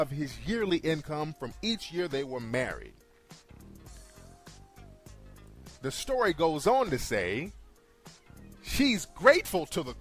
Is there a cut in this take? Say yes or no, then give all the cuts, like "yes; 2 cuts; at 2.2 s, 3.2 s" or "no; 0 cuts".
no; 0 cuts